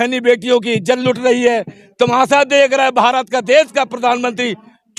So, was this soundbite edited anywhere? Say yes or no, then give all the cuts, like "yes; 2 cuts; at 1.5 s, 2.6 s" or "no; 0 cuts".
no; 0 cuts